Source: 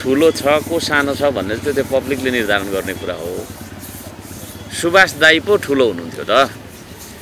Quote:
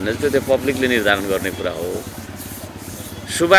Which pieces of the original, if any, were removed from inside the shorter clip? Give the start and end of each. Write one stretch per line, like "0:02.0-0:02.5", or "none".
none